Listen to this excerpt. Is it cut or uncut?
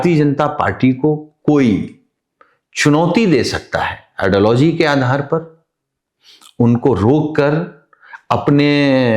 uncut